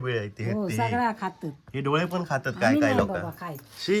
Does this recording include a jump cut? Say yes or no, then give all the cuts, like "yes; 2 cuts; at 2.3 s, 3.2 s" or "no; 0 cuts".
no; 0 cuts